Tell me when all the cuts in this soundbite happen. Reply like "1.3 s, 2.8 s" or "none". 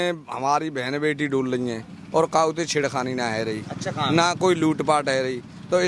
none